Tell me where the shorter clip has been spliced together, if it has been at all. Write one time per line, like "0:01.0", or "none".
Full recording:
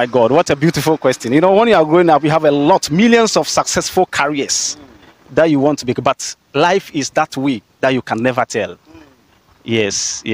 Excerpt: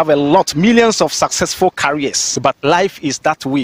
0:02.4